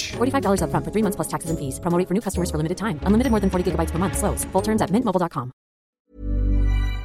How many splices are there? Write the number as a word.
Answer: one